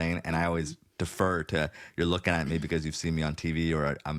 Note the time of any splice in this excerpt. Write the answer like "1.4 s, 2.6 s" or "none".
none